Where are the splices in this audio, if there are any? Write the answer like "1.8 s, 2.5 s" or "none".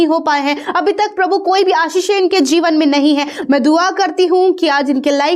3.4 s